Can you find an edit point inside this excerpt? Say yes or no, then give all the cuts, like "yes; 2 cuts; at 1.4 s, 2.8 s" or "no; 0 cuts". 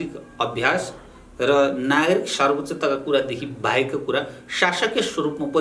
no; 0 cuts